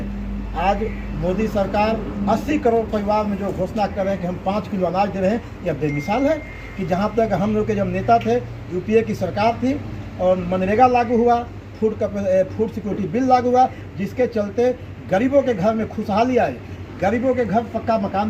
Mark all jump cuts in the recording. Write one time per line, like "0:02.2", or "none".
none